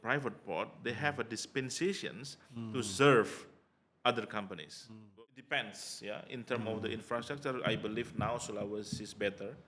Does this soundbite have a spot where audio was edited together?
yes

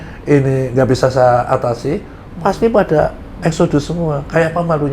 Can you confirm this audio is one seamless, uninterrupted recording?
yes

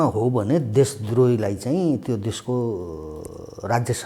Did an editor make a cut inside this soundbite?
no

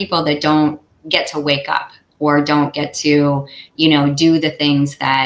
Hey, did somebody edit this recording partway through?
yes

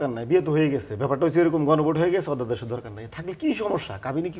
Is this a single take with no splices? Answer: yes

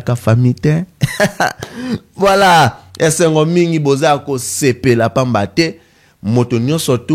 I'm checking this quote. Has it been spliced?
no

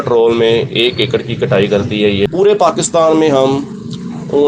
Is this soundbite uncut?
no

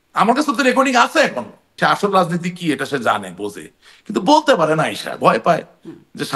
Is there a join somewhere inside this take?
yes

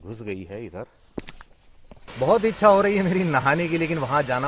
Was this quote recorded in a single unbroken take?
no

